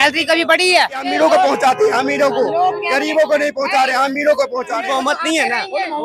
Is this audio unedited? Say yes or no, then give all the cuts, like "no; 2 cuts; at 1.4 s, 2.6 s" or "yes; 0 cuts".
no; 2 cuts; at 1.1 s, 4.8 s